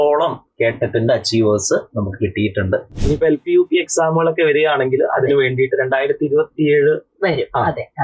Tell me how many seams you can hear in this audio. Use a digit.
1